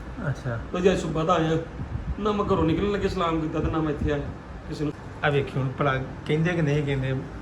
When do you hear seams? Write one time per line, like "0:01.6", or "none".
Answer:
0:05.0